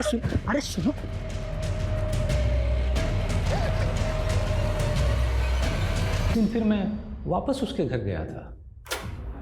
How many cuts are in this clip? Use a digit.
1